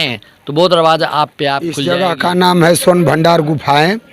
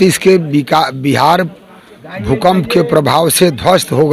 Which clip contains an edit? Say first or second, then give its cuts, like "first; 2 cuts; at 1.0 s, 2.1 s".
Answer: first; 1 cut; at 1.8 s